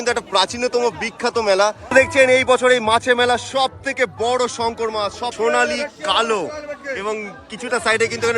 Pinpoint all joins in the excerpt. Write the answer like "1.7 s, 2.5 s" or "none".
1.8 s, 5.3 s